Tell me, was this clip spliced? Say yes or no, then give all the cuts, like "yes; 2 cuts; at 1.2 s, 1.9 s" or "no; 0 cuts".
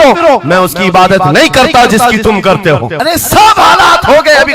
no; 0 cuts